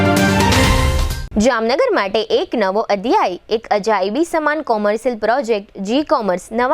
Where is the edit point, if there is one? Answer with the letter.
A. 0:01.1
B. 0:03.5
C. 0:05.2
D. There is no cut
A